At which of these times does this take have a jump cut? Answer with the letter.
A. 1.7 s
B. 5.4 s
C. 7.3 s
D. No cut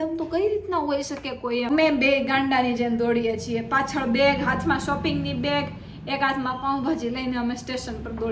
A